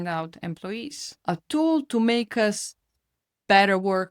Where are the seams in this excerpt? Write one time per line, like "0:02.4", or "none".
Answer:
0:01.0